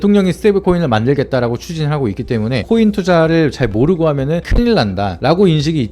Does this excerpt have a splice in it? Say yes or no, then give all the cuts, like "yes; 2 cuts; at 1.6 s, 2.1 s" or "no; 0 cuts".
yes; 1 cut; at 2.6 s